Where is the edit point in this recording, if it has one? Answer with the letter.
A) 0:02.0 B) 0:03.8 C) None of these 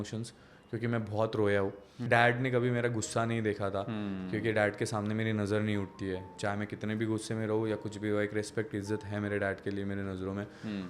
A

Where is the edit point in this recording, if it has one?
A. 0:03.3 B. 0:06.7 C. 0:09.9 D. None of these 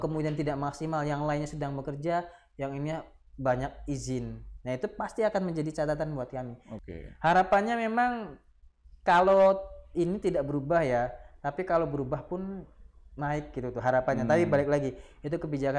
B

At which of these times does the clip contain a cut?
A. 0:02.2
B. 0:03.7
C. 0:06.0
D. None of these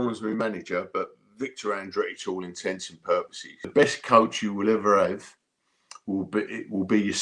B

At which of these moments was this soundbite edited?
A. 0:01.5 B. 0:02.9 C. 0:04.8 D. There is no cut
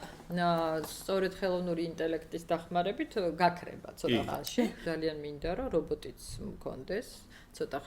C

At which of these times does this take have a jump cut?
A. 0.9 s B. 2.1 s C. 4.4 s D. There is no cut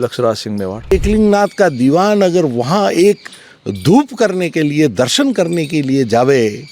A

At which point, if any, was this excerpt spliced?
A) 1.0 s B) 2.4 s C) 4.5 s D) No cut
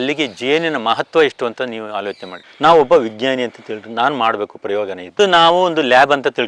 B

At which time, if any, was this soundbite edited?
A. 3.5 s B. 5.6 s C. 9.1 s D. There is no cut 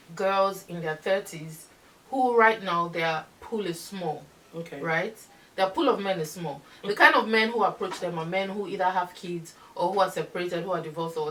D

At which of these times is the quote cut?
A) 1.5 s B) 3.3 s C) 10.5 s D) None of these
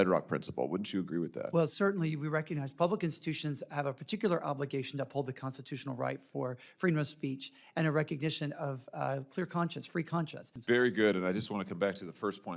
C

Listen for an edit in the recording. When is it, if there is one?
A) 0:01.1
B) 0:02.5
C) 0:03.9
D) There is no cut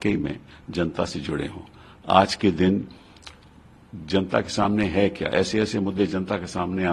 D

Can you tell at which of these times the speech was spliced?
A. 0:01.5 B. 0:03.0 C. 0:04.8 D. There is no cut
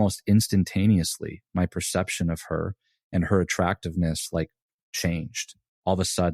D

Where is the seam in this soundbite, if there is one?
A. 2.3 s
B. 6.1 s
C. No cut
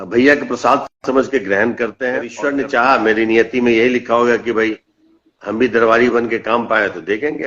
A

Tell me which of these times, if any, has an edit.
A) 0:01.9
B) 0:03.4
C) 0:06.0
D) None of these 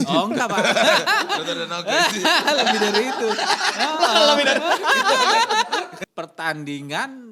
C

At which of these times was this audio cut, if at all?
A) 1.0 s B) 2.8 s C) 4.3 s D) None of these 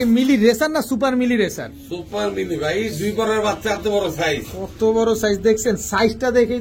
D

